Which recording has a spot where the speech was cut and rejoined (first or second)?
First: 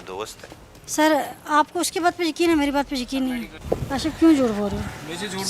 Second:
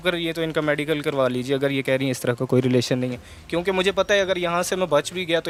first